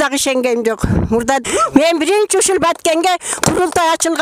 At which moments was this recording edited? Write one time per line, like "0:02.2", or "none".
0:01.4